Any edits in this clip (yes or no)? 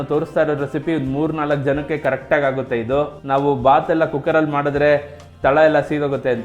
yes